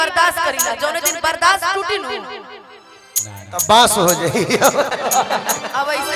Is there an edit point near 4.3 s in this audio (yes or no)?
no